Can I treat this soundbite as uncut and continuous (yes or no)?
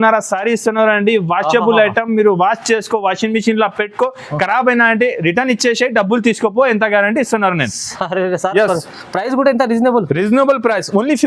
yes